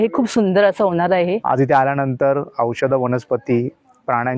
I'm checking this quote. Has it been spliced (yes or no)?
yes